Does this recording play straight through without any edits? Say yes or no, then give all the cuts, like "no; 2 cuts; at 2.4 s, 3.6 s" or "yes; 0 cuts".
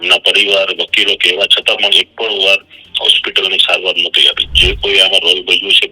no; 1 cut; at 4.4 s